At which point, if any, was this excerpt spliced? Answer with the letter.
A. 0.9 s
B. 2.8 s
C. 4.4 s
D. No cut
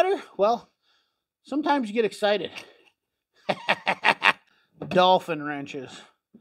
C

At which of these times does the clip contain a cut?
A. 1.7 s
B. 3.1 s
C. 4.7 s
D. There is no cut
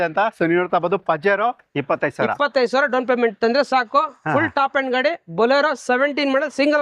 A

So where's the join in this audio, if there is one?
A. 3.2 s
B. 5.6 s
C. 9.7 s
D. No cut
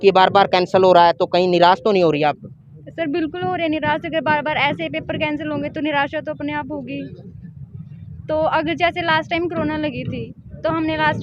D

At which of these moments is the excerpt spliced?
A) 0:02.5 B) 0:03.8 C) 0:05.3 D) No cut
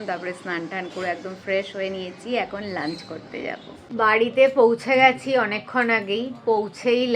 D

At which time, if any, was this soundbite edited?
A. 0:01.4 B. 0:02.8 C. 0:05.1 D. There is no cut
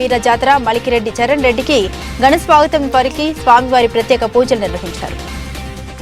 C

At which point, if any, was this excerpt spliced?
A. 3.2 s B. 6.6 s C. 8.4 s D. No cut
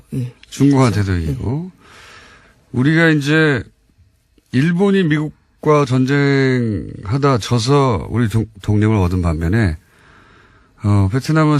A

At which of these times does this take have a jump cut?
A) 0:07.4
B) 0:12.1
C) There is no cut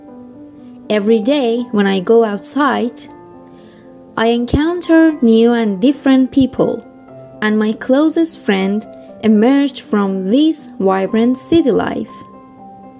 B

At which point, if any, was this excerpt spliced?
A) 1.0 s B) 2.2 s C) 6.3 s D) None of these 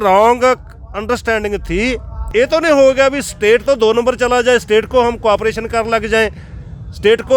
B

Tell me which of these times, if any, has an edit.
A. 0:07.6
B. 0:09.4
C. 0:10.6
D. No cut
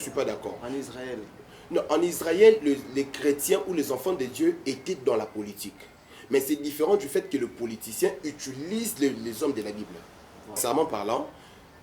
C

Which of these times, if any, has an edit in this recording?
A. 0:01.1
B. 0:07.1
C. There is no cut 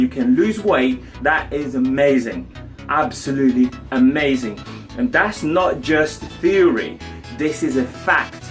A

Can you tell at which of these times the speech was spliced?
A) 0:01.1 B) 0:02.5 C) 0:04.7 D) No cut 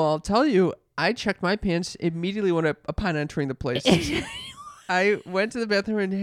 C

